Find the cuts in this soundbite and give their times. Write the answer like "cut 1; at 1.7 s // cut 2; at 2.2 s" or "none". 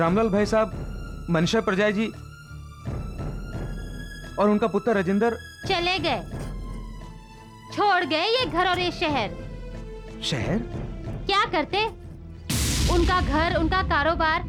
none